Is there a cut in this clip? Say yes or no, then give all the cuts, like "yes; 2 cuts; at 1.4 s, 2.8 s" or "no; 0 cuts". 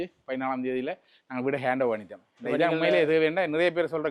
no; 0 cuts